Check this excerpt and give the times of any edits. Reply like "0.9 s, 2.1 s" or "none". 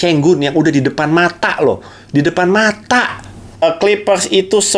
3.6 s